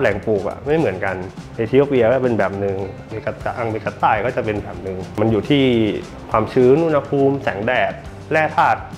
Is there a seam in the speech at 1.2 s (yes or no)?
no